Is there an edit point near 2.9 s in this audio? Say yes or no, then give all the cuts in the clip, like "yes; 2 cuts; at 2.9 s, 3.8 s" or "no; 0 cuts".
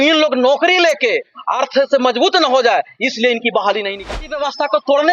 no; 1 cut; at 4.2 s